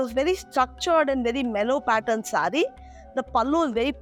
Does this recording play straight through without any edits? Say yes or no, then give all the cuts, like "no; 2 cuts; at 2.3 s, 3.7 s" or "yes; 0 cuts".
yes; 0 cuts